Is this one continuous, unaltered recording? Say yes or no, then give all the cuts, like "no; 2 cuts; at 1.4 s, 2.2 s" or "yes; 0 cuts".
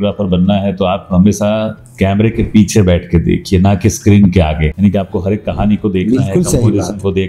no; 1 cut; at 4.7 s